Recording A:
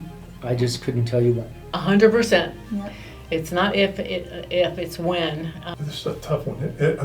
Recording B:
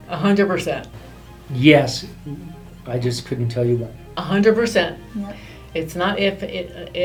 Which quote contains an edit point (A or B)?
A